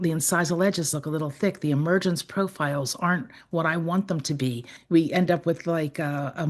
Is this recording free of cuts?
no; 1 cut; at 4.8 s

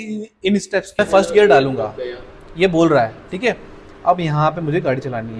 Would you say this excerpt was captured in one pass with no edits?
no; 1 cut; at 1.0 s

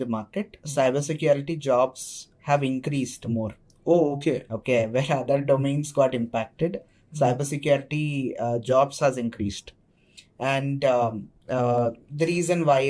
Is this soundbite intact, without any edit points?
yes; 0 cuts

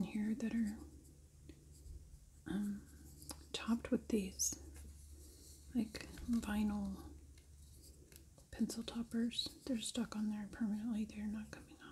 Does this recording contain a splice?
no; 0 cuts

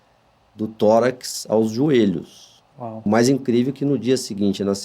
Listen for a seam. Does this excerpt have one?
yes; 1 cut; at 3.1 s

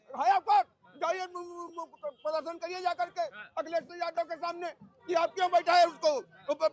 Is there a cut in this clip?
no; 0 cuts

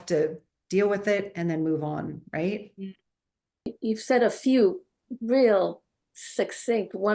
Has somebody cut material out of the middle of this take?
yes; 1 cut; at 3.5 s

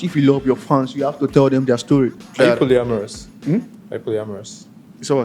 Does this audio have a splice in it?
yes; 1 cut; at 2.2 s

